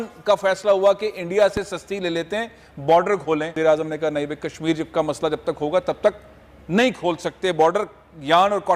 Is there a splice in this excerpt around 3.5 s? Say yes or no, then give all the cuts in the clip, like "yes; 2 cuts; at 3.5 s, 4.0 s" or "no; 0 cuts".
yes; 1 cut; at 3.5 s